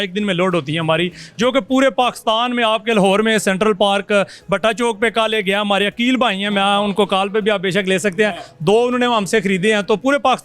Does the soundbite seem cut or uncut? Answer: uncut